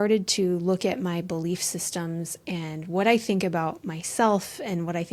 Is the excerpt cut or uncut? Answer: uncut